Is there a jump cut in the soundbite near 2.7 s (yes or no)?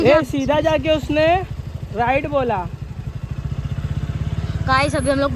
no